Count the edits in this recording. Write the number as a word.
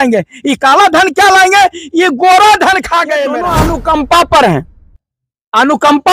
one